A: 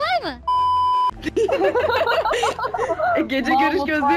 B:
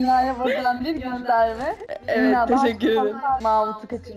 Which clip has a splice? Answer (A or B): B